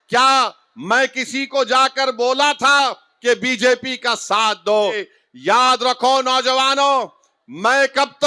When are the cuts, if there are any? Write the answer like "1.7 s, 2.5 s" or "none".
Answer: 5.1 s